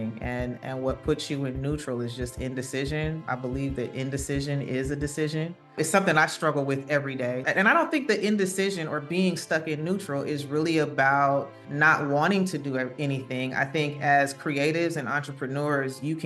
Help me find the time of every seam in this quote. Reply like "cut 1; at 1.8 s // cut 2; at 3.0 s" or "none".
cut 1; at 3.2 s // cut 2; at 5.7 s // cut 3; at 7.4 s // cut 4; at 11.6 s